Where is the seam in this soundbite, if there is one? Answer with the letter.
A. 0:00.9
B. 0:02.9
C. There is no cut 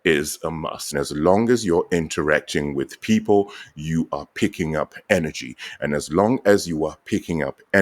A